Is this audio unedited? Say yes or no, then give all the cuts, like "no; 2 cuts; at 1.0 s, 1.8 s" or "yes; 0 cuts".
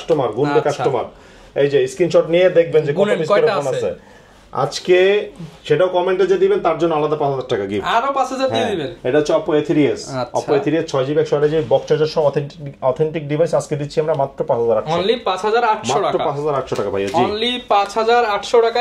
yes; 0 cuts